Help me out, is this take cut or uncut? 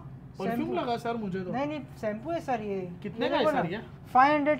uncut